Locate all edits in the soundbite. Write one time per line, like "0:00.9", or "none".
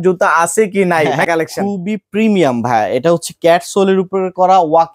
0:01.3